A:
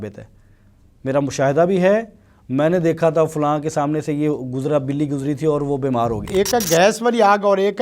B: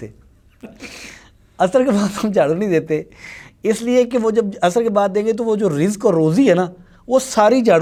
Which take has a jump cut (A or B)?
A